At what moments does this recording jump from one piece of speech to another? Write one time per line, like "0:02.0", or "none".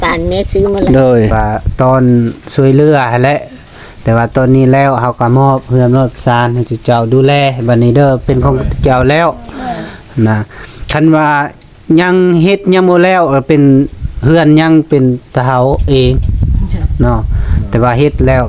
0:01.3